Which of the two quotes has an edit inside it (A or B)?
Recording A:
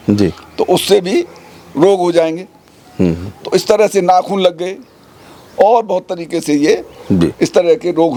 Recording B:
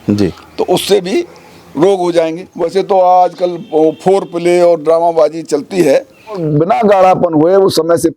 B